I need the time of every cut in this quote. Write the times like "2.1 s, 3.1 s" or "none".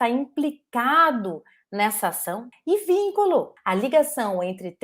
2.5 s, 3.6 s